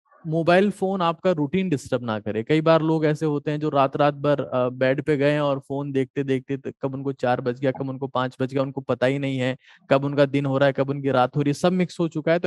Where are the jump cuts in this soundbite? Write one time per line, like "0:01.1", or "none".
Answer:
none